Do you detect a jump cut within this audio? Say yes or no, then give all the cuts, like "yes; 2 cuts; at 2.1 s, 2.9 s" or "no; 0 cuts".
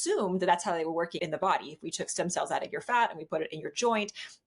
yes; 1 cut; at 1.1 s